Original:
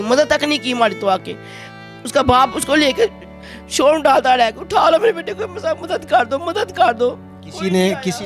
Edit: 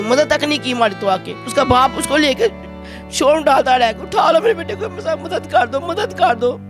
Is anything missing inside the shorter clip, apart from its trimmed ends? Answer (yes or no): yes